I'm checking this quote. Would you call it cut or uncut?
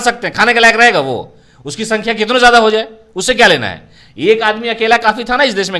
uncut